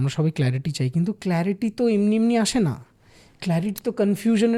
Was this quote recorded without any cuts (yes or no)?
yes